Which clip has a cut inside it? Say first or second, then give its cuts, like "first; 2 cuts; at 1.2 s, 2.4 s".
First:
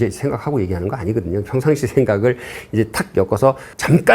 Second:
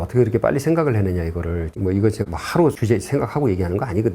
second; 1 cut; at 1.8 s